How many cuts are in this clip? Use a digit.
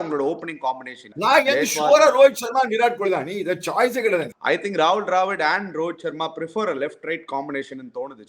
2